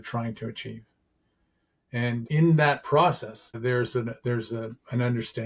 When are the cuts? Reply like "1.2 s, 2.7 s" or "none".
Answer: 2.3 s, 3.5 s